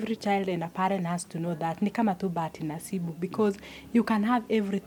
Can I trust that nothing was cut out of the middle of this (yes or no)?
yes